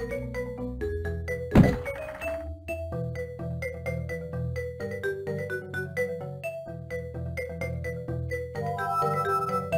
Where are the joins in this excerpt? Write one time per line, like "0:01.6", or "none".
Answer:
none